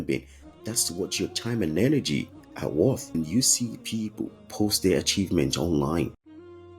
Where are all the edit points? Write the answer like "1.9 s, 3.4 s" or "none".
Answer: 3.2 s